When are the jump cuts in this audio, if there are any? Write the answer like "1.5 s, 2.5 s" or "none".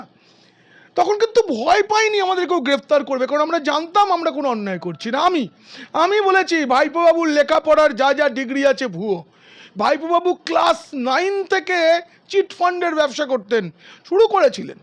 none